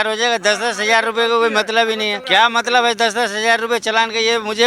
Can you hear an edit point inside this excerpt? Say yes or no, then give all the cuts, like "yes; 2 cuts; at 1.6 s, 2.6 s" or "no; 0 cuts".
yes; 1 cut; at 2.2 s